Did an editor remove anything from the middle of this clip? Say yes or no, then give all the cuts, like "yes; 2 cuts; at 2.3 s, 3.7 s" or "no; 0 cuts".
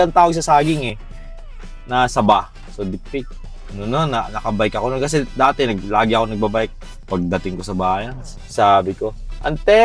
no; 0 cuts